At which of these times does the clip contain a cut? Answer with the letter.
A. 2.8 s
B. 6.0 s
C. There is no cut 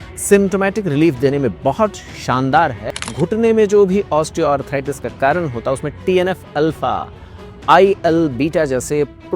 A